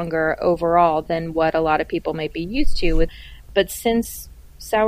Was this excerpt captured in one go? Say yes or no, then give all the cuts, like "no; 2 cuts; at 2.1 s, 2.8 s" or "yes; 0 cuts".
no; 1 cut; at 3.1 s